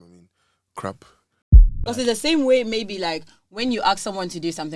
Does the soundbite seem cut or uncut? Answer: cut